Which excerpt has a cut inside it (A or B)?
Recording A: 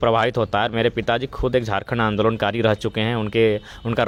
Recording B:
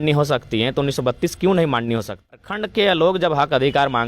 B